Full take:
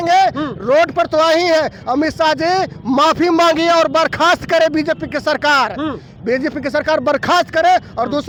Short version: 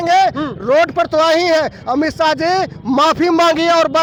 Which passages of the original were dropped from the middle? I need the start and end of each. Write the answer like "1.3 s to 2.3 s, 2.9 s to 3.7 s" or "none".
none